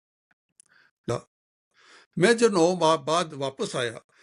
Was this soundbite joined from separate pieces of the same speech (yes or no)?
yes